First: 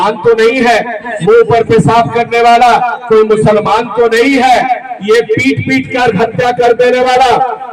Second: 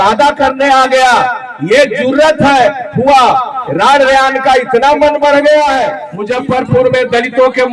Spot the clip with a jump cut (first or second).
second